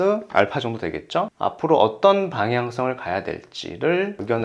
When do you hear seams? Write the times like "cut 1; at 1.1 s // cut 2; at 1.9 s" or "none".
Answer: none